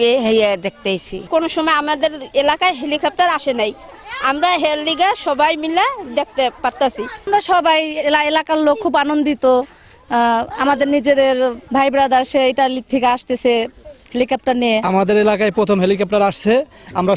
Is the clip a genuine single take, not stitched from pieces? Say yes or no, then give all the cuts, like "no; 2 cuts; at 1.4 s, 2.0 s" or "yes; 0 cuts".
no; 3 cuts; at 1.3 s, 7.2 s, 14.8 s